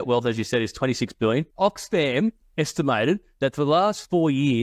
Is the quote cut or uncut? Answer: cut